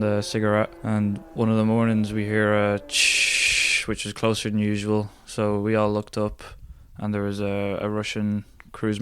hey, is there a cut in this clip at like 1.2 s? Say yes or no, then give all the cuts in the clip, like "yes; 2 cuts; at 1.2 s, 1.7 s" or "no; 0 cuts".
yes; 1 cut; at 1.2 s